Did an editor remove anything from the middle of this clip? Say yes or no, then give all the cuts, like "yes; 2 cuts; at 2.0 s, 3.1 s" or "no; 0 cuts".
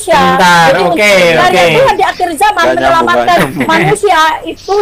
no; 0 cuts